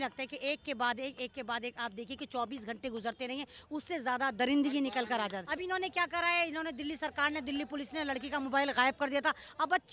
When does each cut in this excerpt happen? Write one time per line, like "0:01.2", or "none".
0:05.4